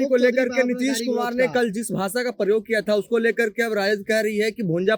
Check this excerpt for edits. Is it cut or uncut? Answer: uncut